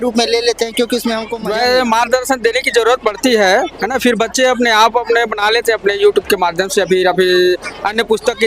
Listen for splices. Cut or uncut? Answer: cut